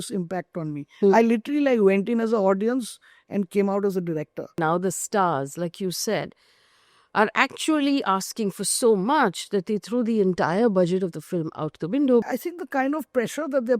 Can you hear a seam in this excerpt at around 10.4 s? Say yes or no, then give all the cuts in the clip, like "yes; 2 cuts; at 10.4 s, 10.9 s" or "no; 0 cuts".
no; 2 cuts; at 4.6 s, 12.2 s